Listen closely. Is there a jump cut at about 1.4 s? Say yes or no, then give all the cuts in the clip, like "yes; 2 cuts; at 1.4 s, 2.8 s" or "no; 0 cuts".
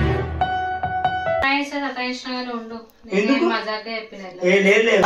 yes; 1 cut; at 1.4 s